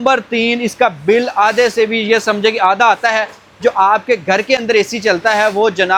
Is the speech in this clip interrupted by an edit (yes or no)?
no